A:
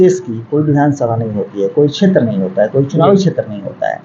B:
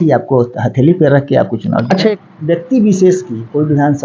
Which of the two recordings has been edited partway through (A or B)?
B